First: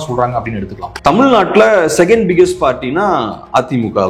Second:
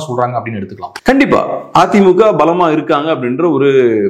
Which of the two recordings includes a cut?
first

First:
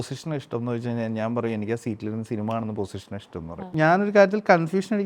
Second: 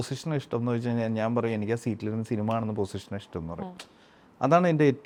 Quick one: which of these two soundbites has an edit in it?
first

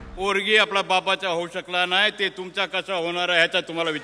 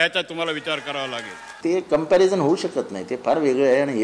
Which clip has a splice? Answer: second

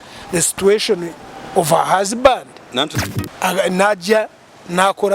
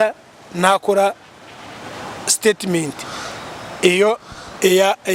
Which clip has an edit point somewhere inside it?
first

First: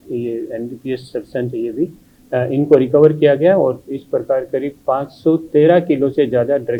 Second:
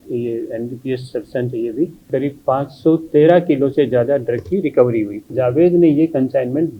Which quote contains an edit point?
second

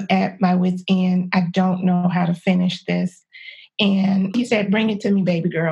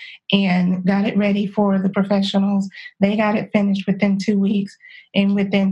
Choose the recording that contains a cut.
second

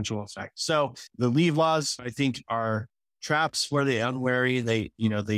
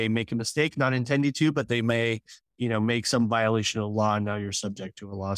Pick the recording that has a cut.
first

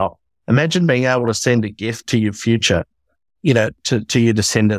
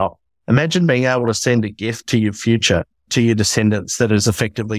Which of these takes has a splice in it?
second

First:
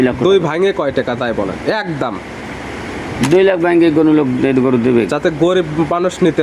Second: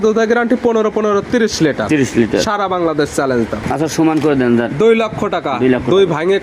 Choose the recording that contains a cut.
second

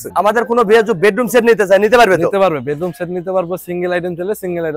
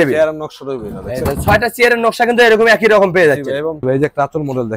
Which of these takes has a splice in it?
second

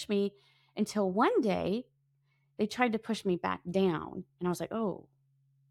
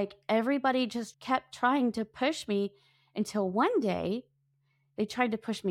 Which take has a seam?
second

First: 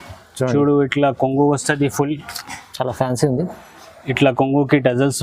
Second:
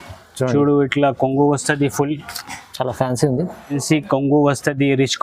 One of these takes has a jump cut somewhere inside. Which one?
second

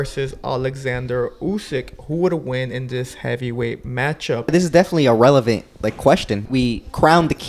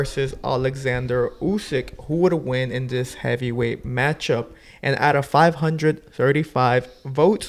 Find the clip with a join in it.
first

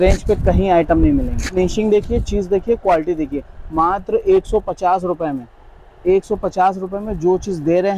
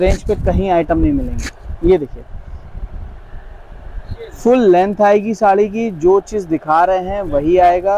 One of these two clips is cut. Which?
first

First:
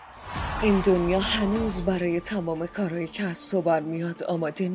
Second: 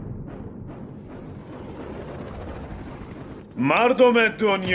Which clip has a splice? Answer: second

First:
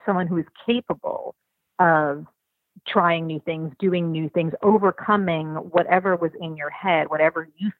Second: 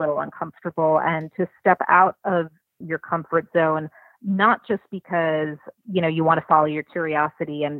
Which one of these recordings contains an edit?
second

